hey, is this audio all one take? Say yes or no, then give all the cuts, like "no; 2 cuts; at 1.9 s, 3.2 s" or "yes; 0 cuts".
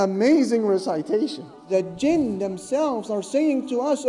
no; 1 cut; at 1.6 s